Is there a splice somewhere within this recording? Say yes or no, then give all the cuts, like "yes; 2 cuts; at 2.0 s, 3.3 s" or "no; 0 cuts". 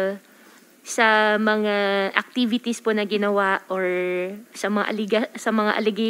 no; 0 cuts